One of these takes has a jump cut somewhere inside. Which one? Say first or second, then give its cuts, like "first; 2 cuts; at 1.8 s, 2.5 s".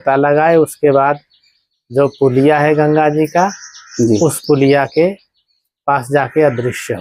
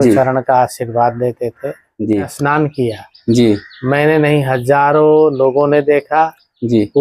second; 1 cut; at 2.3 s